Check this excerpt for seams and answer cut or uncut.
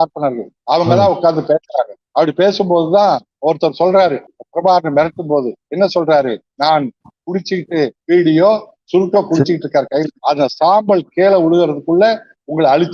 cut